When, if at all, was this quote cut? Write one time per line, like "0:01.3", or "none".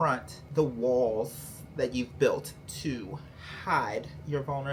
none